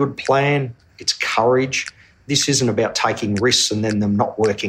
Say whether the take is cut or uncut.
cut